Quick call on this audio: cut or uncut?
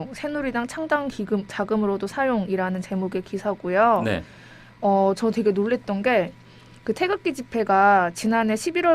cut